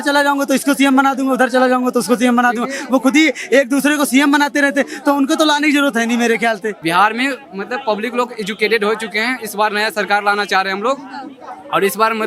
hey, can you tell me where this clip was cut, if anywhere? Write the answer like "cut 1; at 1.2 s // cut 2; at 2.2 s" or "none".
cut 1; at 6.8 s